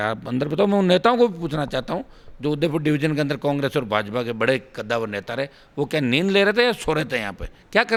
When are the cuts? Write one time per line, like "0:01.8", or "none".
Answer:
none